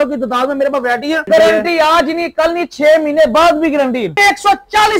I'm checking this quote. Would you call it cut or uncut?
cut